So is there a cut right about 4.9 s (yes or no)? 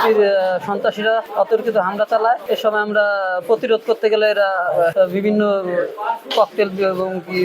yes